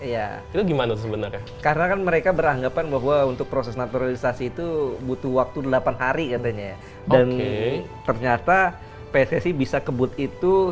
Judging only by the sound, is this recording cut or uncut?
uncut